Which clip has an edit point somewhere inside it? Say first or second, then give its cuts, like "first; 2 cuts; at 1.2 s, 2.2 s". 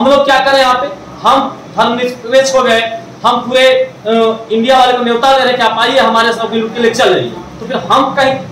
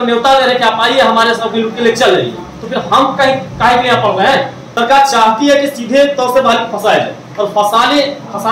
second; 1 cut; at 4.6 s